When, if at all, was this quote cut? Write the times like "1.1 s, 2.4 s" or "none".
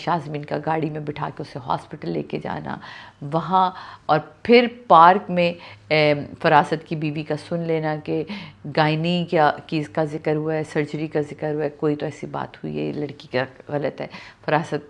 none